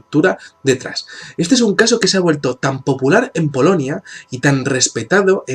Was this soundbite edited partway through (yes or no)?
no